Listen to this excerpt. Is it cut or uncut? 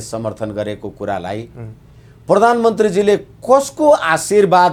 uncut